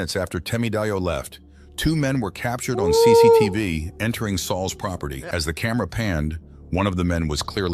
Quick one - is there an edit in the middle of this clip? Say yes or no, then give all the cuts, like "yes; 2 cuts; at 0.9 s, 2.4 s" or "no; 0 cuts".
yes; 1 cut; at 5.2 s